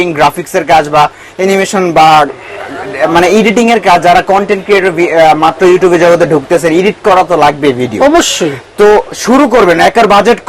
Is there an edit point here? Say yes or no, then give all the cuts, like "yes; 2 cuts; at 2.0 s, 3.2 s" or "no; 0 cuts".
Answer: no; 0 cuts